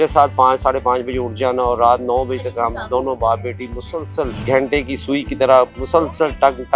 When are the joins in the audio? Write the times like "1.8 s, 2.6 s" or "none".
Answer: none

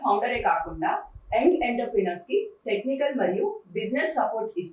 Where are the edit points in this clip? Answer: none

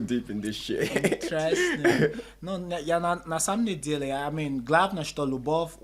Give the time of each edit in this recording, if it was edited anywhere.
none

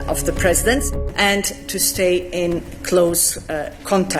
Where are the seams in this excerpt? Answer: 1.1 s

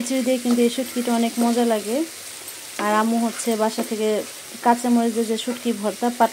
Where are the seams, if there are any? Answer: none

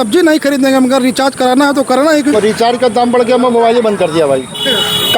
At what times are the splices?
2.3 s

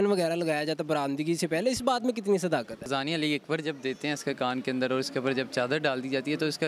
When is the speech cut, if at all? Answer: 2.9 s

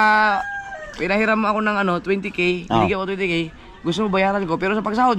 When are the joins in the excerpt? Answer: none

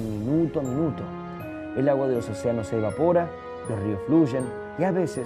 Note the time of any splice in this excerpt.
1.6 s

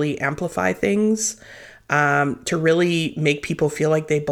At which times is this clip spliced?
none

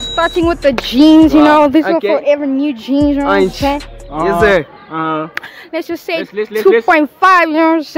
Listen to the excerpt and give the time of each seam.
none

